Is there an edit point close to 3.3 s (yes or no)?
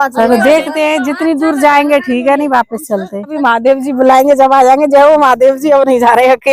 yes